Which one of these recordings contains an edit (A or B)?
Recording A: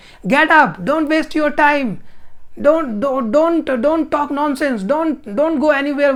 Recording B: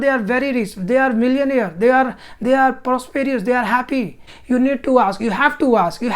B